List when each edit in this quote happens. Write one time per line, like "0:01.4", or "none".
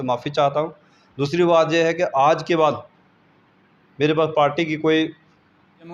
none